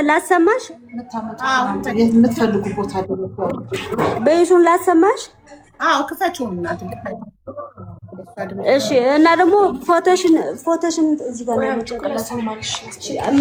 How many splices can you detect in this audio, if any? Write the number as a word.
zero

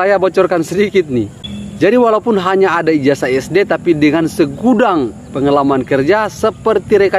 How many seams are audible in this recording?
one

